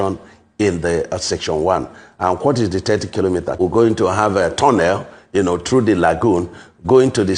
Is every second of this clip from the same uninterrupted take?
no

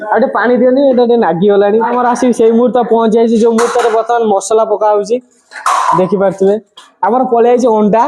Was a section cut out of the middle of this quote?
yes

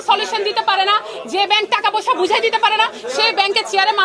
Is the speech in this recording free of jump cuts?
yes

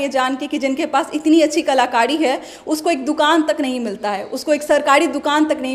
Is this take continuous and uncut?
yes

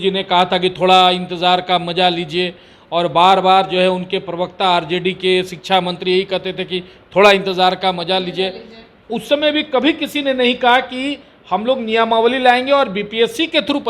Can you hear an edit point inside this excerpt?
no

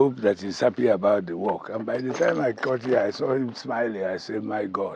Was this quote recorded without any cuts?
yes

